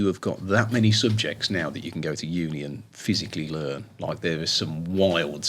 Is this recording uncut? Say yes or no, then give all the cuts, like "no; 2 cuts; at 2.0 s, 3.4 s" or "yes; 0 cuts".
yes; 0 cuts